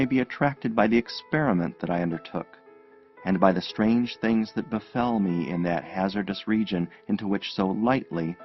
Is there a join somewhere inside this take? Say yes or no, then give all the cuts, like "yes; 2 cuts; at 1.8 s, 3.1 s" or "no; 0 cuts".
yes; 1 cut; at 4.1 s